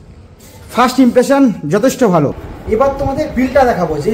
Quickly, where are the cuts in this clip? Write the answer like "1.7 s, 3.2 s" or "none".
2.5 s